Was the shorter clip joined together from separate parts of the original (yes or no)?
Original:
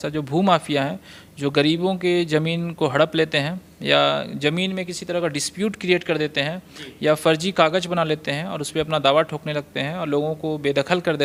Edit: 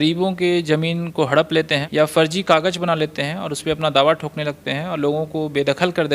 yes